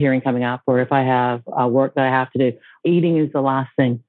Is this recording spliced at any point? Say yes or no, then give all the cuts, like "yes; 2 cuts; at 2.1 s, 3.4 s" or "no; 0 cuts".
yes; 1 cut; at 2.7 s